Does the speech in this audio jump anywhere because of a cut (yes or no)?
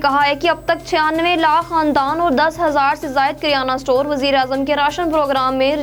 no